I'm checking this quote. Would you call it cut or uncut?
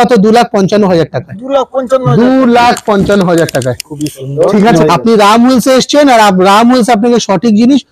cut